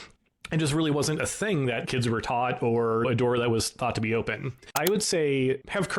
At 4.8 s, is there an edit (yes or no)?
yes